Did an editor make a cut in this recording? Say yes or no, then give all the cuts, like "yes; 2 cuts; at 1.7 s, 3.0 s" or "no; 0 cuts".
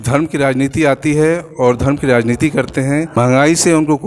yes; 1 cut; at 3.2 s